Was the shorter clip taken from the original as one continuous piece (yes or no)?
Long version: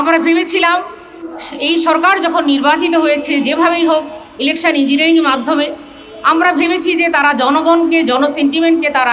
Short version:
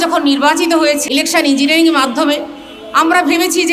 no